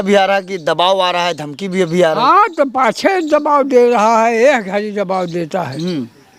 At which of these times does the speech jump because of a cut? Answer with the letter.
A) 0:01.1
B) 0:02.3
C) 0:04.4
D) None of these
D